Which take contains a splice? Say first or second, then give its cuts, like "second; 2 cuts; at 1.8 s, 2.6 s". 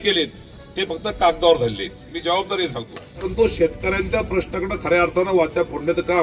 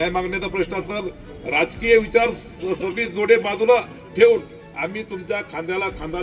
first; 1 cut; at 3.3 s